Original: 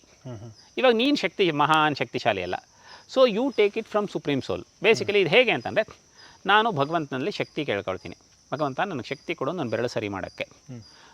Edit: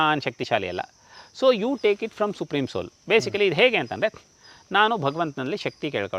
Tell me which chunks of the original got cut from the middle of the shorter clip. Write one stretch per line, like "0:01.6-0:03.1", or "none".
none